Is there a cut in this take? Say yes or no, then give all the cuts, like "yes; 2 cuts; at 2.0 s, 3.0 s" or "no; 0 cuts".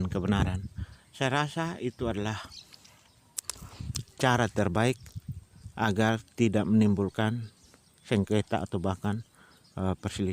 no; 0 cuts